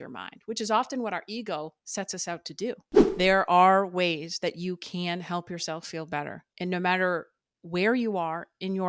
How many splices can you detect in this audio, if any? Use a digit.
1